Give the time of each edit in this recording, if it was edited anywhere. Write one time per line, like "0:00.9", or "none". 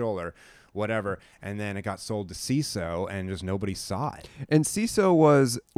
none

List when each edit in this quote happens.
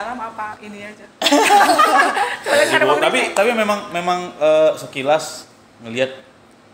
none

